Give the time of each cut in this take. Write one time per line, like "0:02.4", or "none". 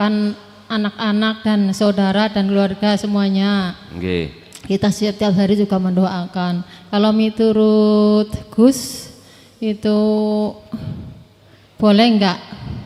none